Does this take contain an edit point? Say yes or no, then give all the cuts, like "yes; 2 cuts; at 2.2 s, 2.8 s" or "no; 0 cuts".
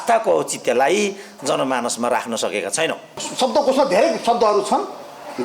yes; 1 cut; at 3.2 s